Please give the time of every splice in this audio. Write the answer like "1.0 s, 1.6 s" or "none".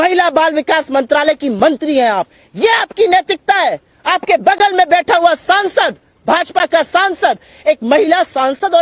none